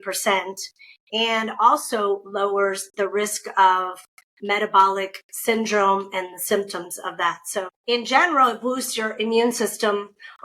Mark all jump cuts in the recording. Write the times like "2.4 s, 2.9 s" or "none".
7.7 s

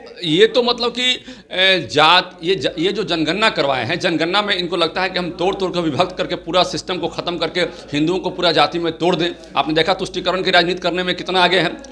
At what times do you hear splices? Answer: none

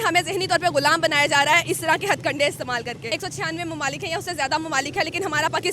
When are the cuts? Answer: 3.1 s

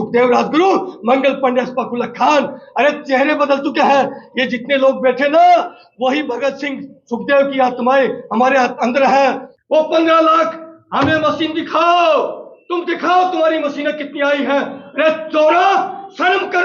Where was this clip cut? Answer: 9.5 s

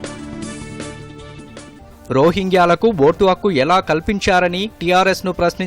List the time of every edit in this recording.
1.7 s

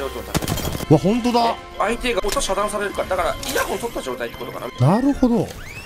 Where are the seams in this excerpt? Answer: 0.8 s, 2.2 s, 3.4 s, 4.7 s

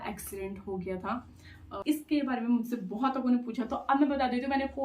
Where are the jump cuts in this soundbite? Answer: 1.7 s

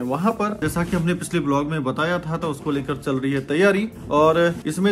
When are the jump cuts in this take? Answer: none

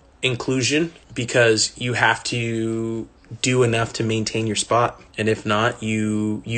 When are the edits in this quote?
1.0 s, 5.0 s

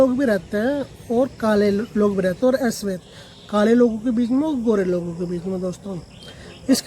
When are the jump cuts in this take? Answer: 2.4 s

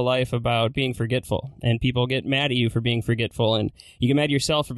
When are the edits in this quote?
none

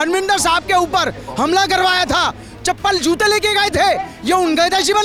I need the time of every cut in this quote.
none

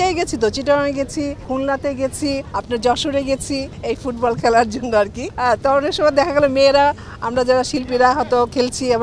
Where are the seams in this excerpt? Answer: 1.4 s, 2.5 s, 3.7 s, 5.2 s

